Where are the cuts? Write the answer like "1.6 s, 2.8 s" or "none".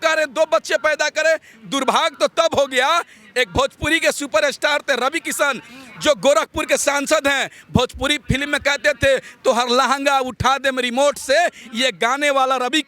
none

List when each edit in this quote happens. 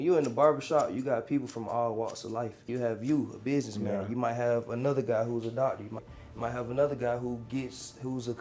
2.6 s, 6.1 s

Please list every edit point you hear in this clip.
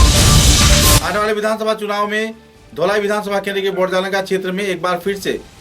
1.0 s

